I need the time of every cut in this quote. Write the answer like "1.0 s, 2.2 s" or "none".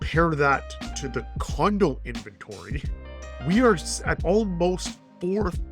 4.1 s